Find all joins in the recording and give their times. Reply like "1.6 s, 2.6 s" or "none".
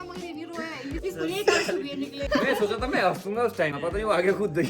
1.0 s, 2.2 s, 3.7 s